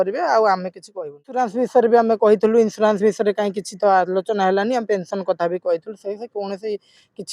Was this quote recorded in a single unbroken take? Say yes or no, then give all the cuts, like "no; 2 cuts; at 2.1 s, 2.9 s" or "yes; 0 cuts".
no; 1 cut; at 1.3 s